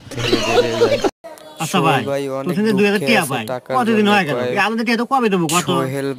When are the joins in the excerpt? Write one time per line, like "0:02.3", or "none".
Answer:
0:01.1

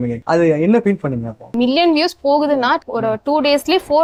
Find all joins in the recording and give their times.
none

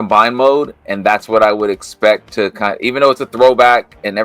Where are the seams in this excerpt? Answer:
none

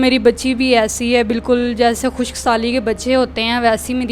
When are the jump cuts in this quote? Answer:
none

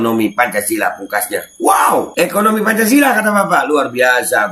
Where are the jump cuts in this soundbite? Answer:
0:02.1

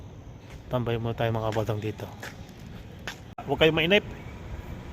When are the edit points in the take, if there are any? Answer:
0:03.4

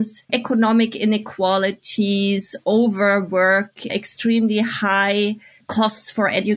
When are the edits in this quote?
none

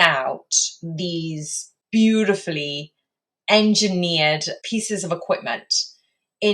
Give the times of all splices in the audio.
0:01.8
0:04.5

